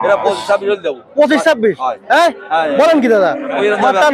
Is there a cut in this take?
no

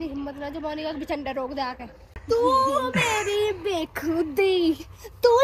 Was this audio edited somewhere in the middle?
yes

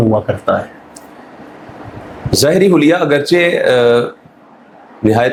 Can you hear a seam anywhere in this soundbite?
no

